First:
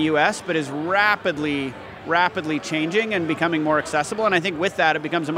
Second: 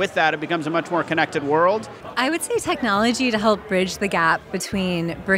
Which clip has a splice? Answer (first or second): second